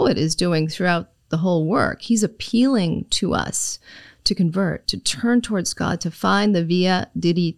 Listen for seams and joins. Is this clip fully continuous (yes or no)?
yes